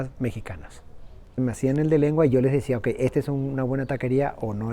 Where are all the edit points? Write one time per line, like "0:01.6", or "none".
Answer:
0:01.3